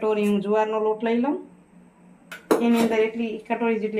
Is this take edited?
no; 0 cuts

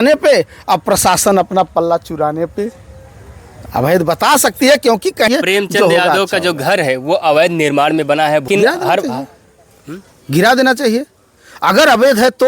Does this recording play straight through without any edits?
no; 2 cuts; at 5.3 s, 8.5 s

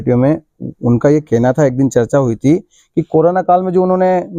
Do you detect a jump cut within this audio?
no; 0 cuts

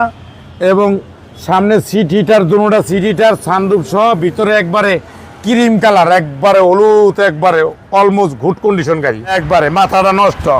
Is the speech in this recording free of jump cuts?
no; 1 cut; at 9.3 s

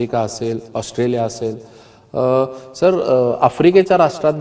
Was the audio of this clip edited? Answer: no; 0 cuts

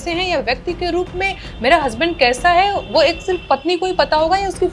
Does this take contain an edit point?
no; 0 cuts

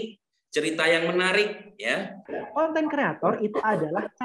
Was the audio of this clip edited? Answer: yes; 1 cut; at 2.3 s

